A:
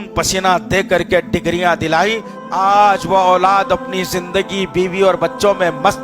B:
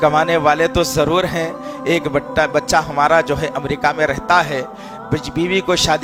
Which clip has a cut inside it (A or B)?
A